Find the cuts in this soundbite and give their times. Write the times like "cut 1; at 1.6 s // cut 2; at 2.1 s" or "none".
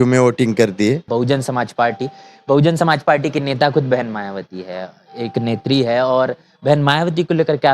cut 1; at 1.0 s